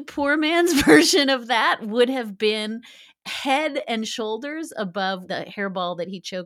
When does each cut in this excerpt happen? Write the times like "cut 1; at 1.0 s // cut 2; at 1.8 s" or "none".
cut 1; at 5.2 s